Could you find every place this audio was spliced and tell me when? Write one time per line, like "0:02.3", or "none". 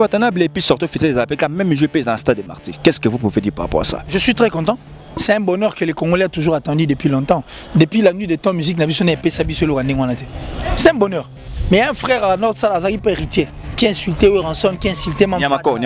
0:11.5